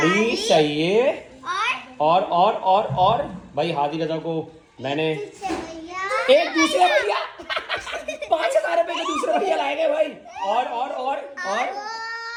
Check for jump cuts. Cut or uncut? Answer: uncut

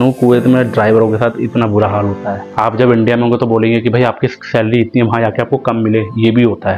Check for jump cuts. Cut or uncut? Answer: cut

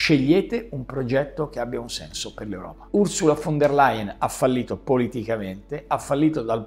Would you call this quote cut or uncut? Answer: cut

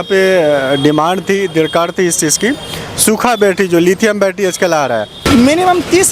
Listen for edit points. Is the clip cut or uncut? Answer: cut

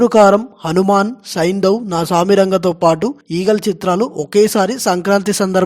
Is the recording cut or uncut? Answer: cut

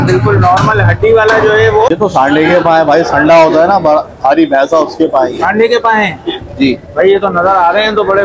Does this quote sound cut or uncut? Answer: cut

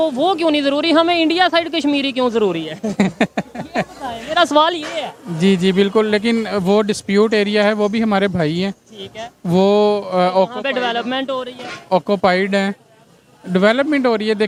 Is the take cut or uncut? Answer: uncut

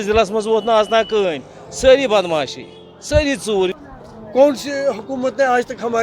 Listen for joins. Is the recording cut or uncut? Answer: cut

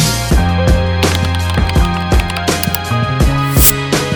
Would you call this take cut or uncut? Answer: uncut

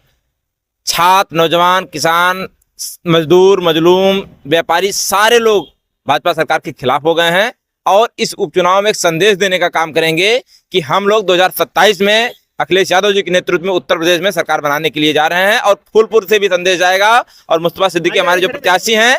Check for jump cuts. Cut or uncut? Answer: uncut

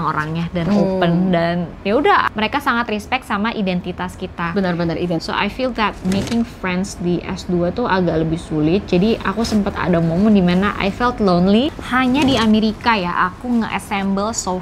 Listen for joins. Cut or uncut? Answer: cut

